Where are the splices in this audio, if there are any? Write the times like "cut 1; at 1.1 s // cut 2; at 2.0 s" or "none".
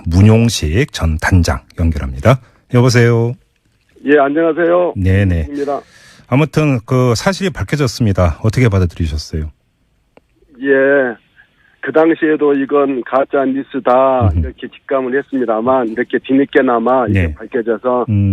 none